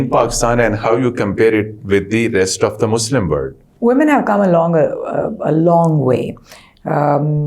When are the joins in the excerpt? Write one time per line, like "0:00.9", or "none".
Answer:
0:03.6